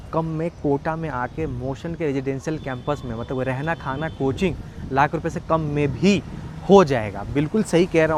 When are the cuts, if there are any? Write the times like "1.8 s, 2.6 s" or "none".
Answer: none